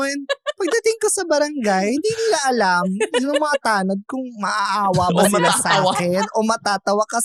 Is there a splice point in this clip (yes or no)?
no